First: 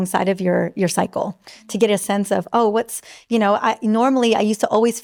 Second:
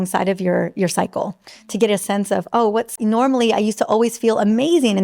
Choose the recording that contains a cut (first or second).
second